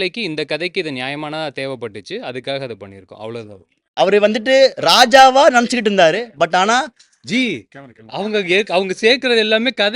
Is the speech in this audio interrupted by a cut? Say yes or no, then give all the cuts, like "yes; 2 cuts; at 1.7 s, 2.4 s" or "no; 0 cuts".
yes; 1 cut; at 3.9 s